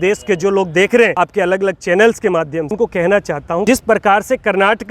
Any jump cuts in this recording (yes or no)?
yes